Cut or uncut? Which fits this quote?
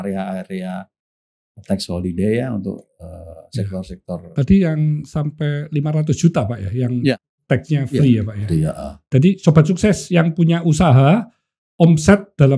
uncut